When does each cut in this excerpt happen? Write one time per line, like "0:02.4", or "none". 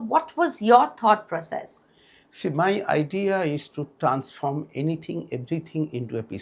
none